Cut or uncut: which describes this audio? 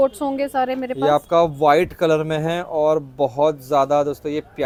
uncut